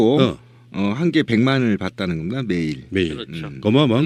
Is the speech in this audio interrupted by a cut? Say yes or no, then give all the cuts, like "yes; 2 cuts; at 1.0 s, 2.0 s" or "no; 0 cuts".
no; 0 cuts